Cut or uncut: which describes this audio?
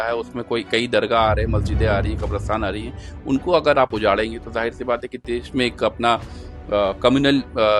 uncut